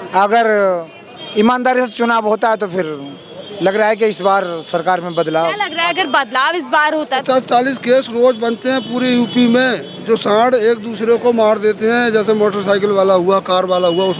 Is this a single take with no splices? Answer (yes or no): no